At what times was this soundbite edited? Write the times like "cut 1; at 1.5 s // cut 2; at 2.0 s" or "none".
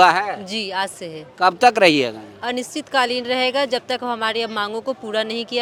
none